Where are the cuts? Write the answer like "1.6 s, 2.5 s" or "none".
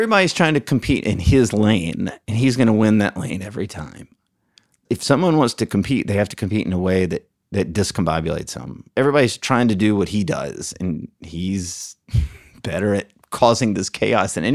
4.8 s, 7.4 s, 8.9 s